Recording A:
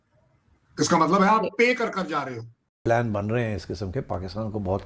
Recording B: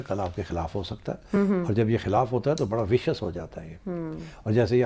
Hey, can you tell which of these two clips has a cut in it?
A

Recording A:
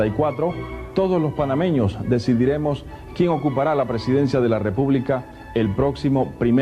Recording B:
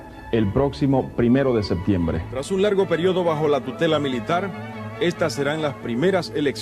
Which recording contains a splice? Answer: B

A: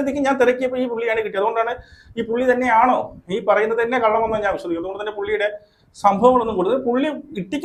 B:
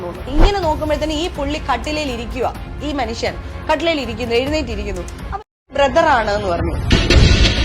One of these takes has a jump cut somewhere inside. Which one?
B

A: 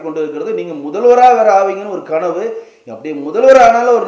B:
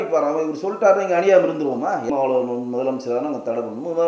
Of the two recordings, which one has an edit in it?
B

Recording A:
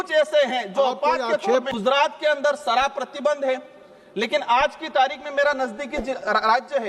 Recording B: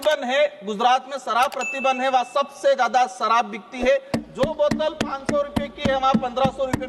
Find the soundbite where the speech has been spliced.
A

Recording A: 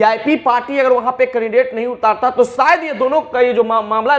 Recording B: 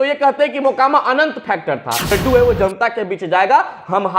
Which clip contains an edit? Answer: B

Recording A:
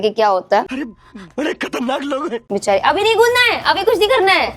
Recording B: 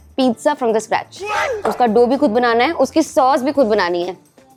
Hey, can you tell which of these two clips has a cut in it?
A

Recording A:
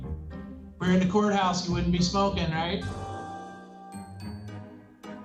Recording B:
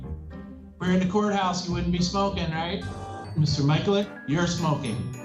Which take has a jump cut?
B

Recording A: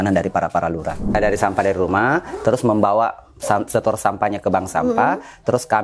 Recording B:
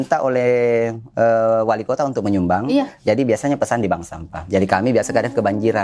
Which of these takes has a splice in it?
A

